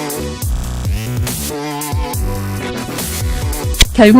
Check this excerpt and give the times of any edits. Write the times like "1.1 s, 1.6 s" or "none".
3.0 s